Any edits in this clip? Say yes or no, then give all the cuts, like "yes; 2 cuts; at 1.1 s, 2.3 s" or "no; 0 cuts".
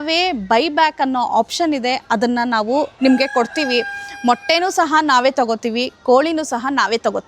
no; 0 cuts